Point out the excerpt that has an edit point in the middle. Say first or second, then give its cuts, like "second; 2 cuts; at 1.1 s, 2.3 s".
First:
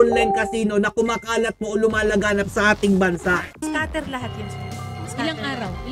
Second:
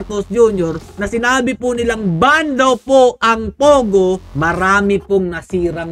first; 2 cuts; at 3.5 s, 5.0 s